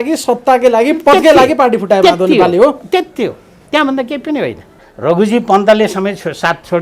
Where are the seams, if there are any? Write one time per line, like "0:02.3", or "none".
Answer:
0:04.9